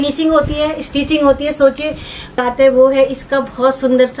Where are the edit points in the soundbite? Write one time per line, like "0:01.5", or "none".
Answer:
0:02.3